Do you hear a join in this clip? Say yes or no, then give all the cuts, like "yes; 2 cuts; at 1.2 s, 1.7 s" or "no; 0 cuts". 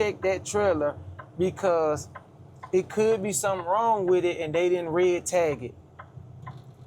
no; 0 cuts